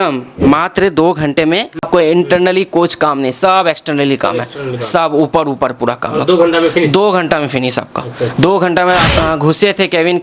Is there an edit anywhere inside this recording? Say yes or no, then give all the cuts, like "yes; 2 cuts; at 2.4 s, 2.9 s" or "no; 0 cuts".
yes; 2 cuts; at 1.9 s, 9.1 s